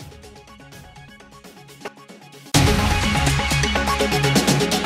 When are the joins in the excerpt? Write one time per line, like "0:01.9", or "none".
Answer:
0:00.9
0:01.9